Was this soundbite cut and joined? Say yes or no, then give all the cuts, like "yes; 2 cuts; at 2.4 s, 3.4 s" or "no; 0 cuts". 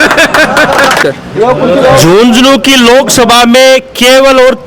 yes; 1 cut; at 1.0 s